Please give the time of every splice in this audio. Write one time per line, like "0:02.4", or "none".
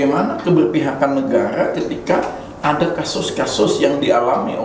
none

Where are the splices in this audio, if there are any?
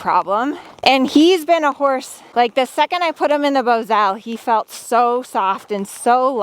0:00.8
0:02.2

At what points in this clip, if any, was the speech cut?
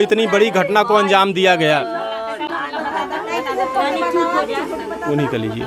none

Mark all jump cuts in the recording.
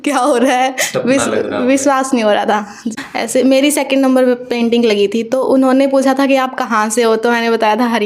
0:02.9

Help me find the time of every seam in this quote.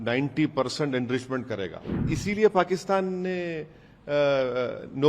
0:02.1

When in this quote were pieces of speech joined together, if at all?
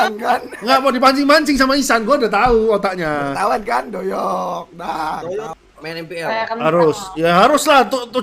0:05.5

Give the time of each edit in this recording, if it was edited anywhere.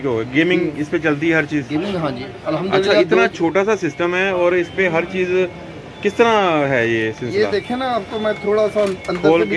none

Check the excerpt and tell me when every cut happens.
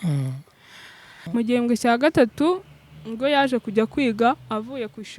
0:01.1

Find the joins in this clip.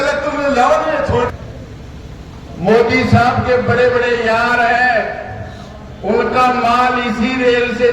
0:01.3

